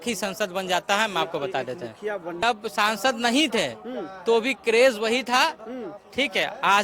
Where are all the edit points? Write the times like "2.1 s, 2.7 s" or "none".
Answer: 2.4 s